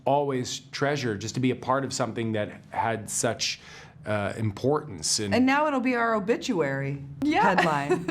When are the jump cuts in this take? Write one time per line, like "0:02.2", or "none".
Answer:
0:07.0